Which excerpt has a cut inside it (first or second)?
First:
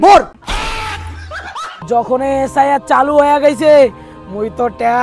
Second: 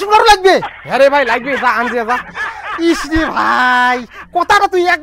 first